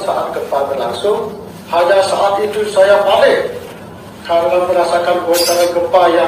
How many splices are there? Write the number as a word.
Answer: one